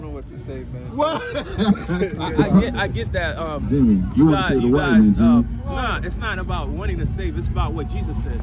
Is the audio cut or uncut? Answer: cut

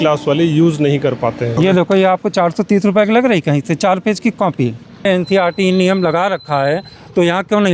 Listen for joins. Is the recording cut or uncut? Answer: cut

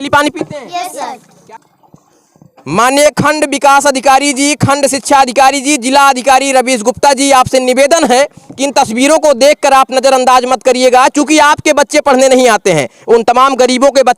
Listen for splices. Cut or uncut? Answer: cut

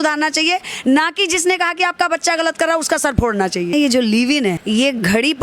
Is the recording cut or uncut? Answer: cut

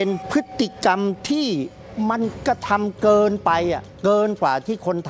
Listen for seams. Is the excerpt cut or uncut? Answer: uncut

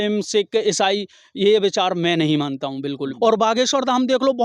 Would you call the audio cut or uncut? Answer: cut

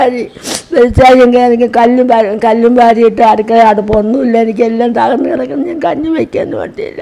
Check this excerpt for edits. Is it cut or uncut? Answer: uncut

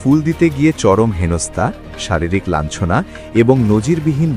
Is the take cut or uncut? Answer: uncut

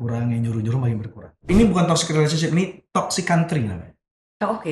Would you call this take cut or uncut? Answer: cut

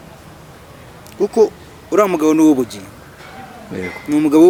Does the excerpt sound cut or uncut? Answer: uncut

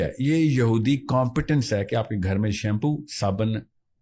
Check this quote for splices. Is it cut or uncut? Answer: uncut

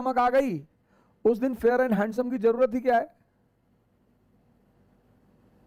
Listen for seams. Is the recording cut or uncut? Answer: uncut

